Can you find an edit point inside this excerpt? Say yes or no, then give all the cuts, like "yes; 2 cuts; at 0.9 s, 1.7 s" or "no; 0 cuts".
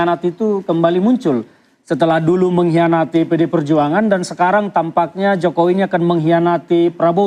no; 0 cuts